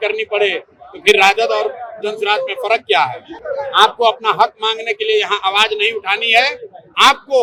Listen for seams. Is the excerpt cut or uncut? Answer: uncut